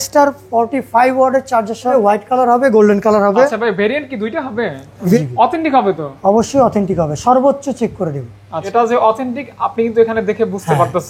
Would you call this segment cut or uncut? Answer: cut